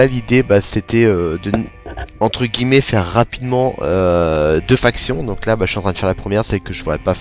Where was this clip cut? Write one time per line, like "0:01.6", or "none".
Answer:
none